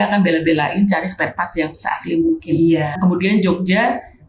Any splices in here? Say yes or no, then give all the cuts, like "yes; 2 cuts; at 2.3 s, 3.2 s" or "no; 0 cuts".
yes; 1 cut; at 3.0 s